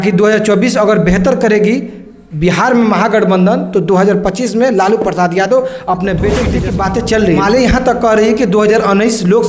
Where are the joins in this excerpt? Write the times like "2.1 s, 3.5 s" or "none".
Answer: 6.6 s